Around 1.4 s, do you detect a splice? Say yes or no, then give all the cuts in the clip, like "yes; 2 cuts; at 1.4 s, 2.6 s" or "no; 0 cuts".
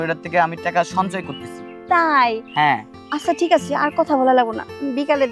no; 1 cut; at 2.9 s